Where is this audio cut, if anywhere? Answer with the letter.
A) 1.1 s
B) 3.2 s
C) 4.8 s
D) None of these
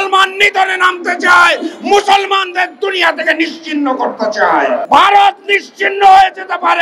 C